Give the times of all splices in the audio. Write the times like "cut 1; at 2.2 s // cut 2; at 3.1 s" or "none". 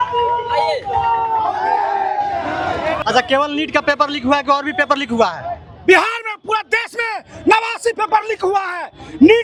none